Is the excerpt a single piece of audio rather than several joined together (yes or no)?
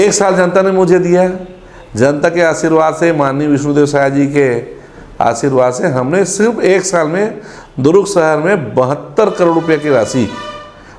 yes